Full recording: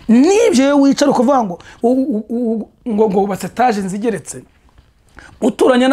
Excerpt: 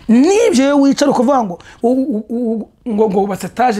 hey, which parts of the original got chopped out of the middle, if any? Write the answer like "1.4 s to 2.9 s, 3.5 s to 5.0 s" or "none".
none